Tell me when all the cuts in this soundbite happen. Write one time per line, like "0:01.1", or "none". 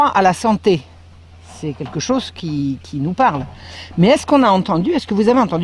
0:03.0